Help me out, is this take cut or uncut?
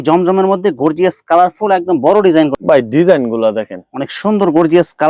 cut